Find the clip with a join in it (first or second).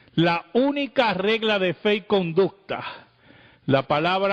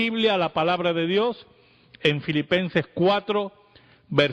first